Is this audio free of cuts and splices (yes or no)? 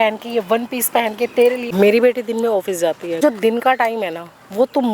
no